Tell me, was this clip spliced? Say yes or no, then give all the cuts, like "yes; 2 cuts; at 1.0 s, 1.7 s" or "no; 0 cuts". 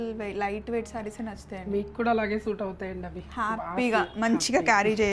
no; 0 cuts